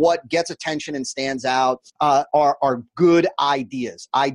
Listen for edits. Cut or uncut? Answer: cut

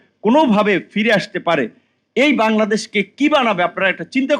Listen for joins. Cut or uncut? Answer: uncut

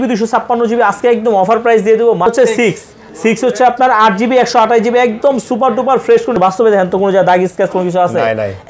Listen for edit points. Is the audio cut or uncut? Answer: cut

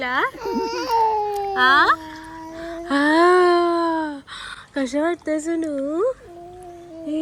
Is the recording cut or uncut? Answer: uncut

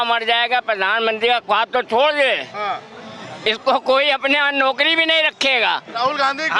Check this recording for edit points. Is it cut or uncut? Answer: uncut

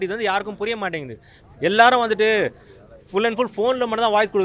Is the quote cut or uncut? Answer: uncut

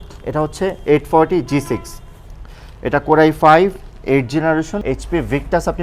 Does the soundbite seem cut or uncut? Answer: cut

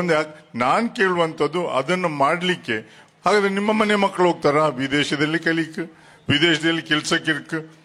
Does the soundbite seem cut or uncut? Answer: uncut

